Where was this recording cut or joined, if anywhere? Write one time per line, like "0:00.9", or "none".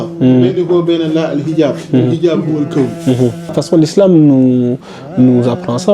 0:03.5